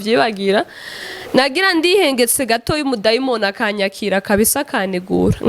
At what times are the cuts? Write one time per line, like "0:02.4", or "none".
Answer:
none